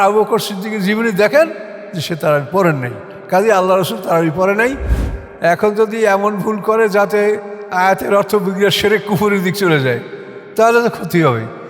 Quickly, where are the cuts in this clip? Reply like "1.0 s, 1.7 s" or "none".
4.9 s